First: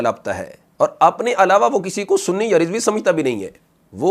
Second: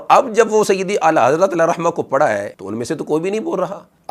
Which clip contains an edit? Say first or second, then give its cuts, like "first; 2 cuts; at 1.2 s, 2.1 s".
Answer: second; 1 cut; at 2.6 s